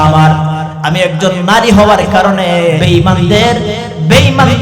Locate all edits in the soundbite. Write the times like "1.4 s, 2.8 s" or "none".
2.8 s